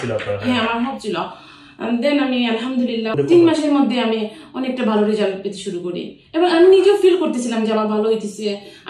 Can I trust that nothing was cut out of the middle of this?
no; 1 cut; at 3.1 s

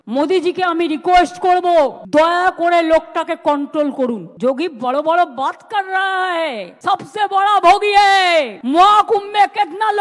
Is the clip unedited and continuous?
no; 1 cut; at 4.3 s

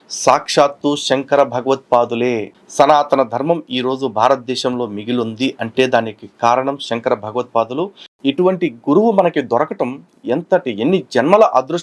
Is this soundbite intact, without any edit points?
no; 2 cuts; at 2.5 s, 8.0 s

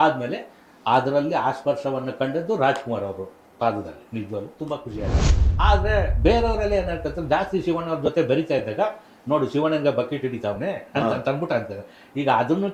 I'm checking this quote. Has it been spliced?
yes; 1 cut; at 5.4 s

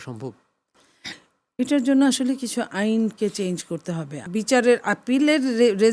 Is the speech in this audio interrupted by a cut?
yes; 1 cut; at 4.2 s

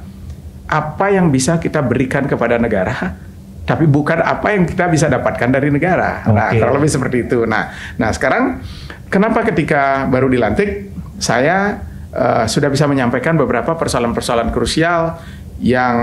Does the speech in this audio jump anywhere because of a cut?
no; 0 cuts

